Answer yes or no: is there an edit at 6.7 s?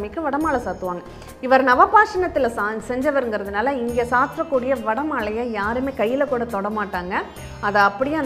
no